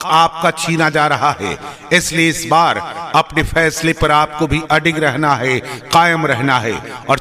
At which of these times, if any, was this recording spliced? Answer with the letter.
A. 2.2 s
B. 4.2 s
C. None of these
C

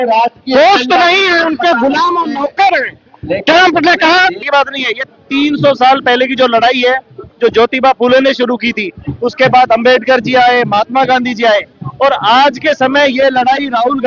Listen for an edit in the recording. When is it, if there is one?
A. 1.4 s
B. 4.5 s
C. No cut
B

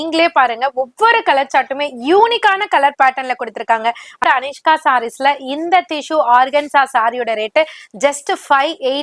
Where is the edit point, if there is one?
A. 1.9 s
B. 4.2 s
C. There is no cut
B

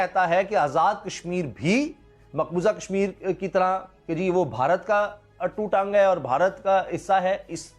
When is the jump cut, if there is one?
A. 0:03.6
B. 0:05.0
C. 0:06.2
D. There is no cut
D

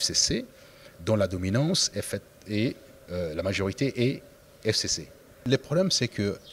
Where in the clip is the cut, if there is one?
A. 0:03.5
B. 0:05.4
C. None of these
B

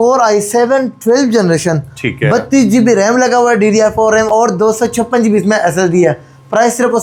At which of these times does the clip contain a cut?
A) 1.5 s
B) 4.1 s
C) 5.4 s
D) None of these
D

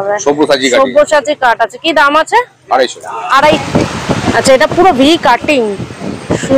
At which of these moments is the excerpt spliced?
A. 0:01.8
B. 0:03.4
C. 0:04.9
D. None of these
B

